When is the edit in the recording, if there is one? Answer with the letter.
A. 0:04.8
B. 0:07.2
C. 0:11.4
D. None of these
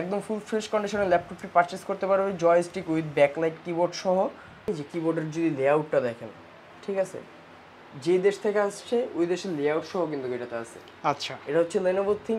A